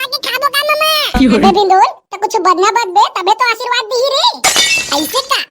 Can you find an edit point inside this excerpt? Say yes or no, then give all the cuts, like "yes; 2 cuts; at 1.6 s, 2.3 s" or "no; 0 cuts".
yes; 1 cut; at 1.2 s